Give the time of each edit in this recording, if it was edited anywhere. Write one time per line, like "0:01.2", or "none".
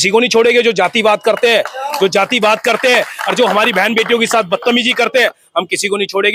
none